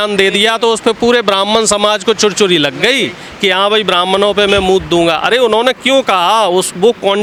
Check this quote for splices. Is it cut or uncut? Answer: uncut